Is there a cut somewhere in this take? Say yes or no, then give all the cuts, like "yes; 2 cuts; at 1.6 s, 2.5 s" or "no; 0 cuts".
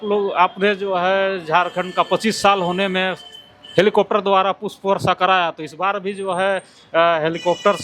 no; 0 cuts